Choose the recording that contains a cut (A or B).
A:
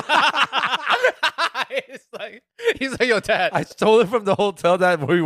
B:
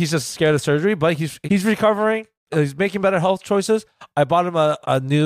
B